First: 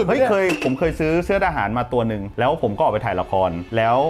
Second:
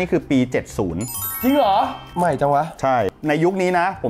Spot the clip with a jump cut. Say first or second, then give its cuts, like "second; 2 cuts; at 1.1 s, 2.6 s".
second; 2 cuts; at 2.0 s, 3.1 s